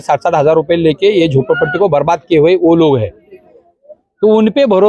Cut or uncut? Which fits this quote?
uncut